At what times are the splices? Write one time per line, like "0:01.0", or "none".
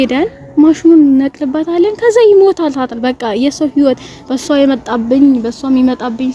none